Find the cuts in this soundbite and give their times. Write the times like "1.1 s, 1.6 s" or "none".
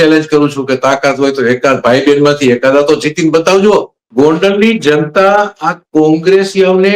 4.0 s